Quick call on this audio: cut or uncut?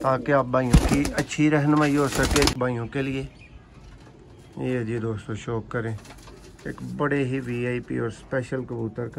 cut